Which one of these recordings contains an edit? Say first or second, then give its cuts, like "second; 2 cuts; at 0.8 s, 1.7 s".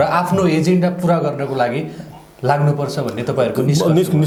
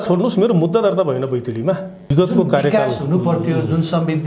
second; 1 cut; at 2.0 s